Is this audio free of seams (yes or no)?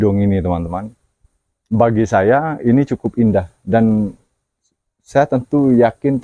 yes